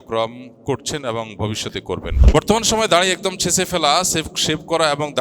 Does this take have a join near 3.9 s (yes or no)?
no